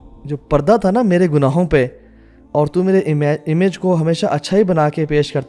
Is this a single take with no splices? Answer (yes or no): yes